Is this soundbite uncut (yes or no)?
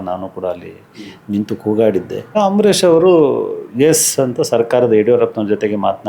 no